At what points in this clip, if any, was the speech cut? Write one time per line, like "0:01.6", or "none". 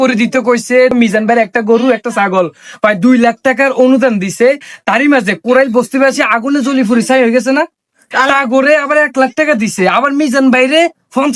0:00.9